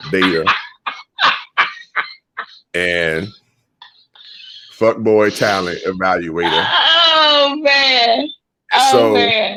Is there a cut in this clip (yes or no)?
no